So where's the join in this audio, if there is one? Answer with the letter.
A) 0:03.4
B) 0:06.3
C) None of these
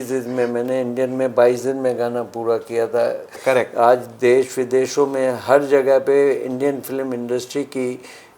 A